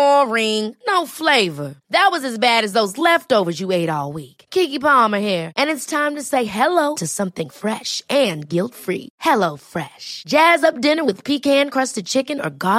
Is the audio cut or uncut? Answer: uncut